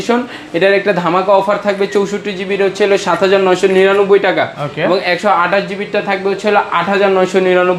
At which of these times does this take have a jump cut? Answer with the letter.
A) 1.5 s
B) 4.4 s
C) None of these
C